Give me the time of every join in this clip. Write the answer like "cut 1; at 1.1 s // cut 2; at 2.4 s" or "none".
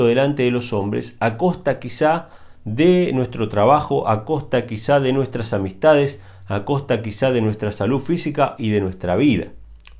none